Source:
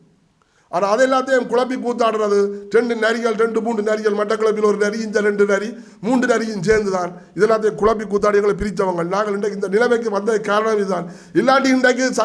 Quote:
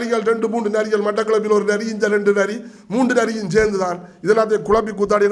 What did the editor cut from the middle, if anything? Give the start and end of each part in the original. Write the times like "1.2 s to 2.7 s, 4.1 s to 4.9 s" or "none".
none